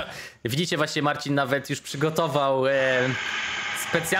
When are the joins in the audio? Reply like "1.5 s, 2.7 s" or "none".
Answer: none